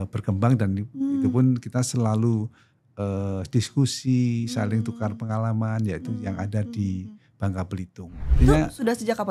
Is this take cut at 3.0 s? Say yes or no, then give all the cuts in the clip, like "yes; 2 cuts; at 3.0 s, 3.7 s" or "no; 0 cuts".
no; 1 cut; at 8.3 s